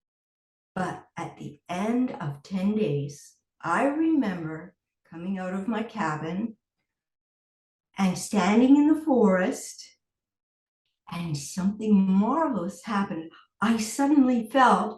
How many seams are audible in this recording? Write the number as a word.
zero